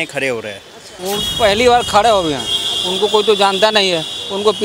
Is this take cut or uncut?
cut